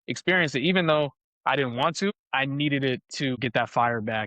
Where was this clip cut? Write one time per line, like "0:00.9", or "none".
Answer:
0:03.4